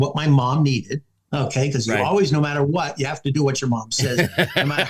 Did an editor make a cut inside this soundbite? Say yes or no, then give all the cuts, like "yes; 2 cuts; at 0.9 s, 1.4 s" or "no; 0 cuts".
no; 0 cuts